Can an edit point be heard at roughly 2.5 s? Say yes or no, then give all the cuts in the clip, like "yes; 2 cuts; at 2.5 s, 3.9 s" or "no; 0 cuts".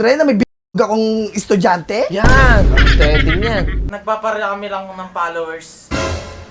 no; 1 cut; at 3.9 s